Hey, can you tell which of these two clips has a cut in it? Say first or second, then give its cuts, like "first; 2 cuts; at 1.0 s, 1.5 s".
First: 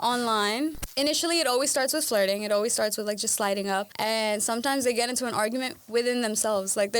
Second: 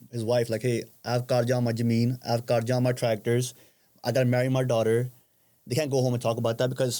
first; 2 cuts; at 0.8 s, 3.9 s